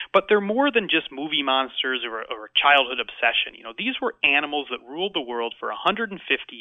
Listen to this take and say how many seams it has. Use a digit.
0